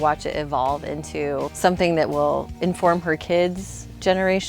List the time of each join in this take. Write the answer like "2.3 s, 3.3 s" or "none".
1.5 s, 2.5 s